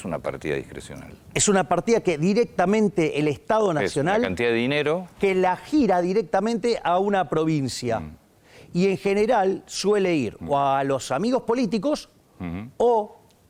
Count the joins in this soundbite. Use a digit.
0